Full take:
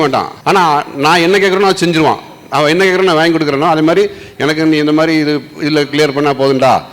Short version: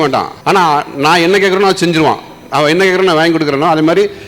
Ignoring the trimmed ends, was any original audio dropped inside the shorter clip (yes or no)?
no